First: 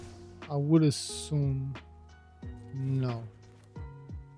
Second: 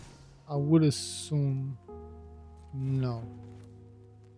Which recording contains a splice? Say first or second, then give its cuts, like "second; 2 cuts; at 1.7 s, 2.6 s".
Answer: second; 1 cut; at 3.2 s